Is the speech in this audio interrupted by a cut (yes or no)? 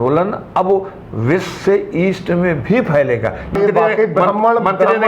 yes